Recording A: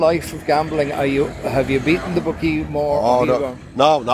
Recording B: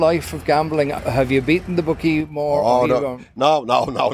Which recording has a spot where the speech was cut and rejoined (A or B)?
B